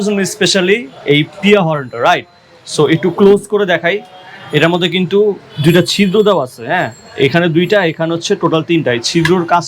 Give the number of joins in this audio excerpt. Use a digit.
0